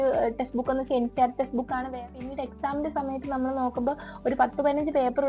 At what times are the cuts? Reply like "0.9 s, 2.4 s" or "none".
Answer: 1.9 s